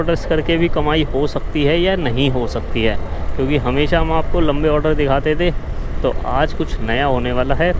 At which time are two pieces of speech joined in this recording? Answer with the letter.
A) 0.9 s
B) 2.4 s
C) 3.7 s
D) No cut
D